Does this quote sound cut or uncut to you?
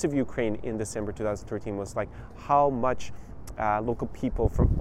uncut